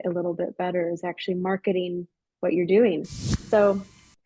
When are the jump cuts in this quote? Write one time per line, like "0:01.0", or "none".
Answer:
0:03.1